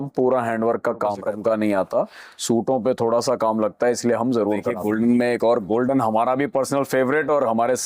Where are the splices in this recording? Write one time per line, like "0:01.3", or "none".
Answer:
0:01.3
0:04.7